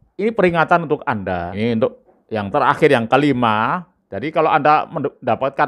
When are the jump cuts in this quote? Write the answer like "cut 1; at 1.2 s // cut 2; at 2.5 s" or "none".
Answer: cut 1; at 1.5 s